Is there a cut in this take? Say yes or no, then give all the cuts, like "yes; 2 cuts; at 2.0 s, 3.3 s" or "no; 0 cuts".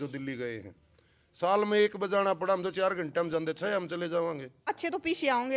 yes; 1 cut; at 4.7 s